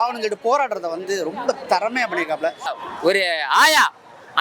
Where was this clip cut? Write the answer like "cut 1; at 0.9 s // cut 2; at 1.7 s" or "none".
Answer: cut 1; at 2.7 s